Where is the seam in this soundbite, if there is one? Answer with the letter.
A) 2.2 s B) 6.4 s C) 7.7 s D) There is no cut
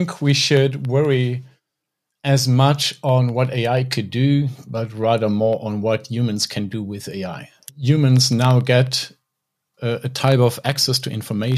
C